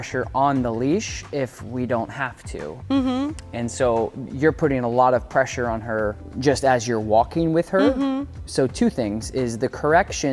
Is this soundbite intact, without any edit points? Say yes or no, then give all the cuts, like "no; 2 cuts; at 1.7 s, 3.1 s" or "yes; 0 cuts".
yes; 0 cuts